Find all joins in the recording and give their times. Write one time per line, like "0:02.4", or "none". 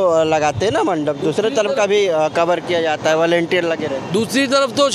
none